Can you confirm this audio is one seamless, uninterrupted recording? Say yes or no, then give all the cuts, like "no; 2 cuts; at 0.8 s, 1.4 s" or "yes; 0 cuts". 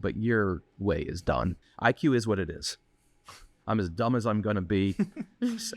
no; 1 cut; at 1.6 s